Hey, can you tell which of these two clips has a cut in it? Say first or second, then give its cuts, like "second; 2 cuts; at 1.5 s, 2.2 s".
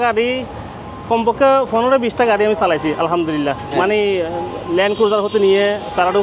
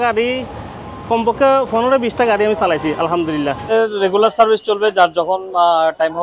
second; 1 cut; at 3.7 s